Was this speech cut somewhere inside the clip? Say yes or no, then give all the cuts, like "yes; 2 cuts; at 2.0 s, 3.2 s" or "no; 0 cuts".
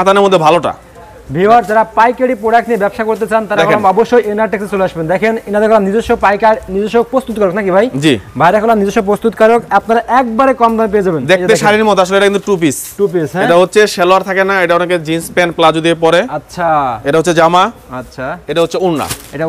no; 0 cuts